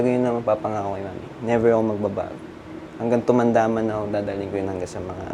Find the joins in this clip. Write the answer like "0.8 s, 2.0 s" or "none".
none